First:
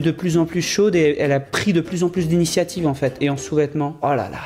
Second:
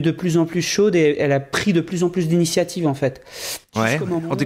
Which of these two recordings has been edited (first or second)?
first